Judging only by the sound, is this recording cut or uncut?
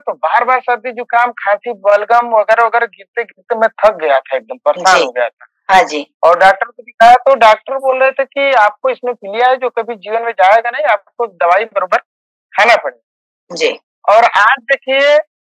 uncut